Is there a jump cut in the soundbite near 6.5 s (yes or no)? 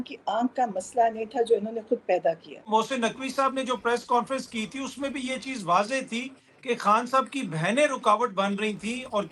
no